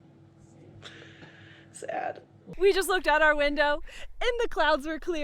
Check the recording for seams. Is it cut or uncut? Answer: cut